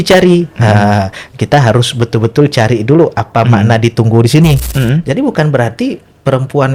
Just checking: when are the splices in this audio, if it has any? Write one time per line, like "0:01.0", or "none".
0:04.7